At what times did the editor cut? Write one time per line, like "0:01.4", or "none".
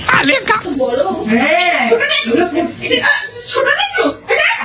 none

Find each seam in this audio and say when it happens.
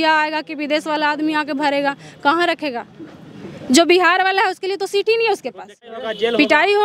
0:05.9

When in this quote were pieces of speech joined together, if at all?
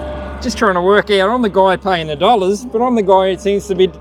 none

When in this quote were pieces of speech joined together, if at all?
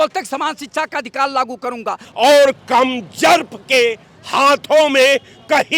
0:02.0

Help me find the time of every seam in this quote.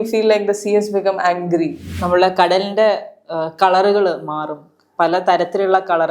0:01.9

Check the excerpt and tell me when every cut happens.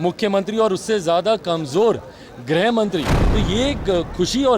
0:03.2

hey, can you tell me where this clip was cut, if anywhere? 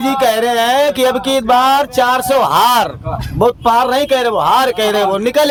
none

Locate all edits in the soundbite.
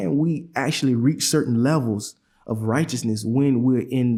none

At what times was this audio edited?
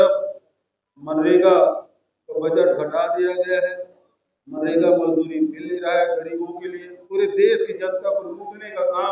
0:06.9

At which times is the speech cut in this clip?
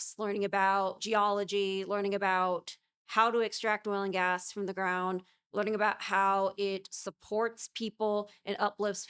0:01.0

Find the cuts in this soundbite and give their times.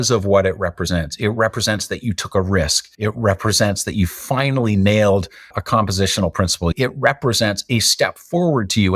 0:02.8
0:06.7

